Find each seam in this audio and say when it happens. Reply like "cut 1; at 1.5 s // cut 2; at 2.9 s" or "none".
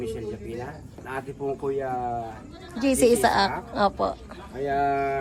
none